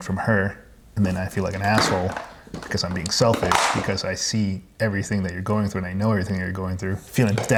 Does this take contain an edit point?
no; 0 cuts

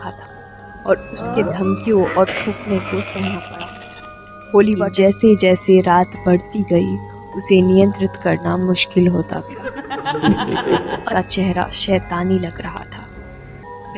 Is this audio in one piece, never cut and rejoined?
no; 2 cuts; at 4.9 s, 11.0 s

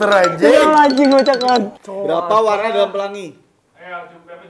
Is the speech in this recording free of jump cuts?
no; 1 cut; at 1.8 s

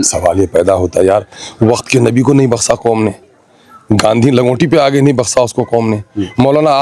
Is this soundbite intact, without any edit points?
yes; 0 cuts

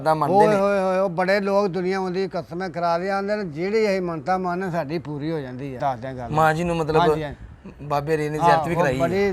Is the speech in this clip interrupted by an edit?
yes; 1 cut; at 5.8 s

